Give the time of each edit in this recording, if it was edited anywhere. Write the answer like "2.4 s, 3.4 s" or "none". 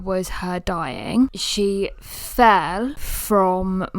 1.4 s, 3.1 s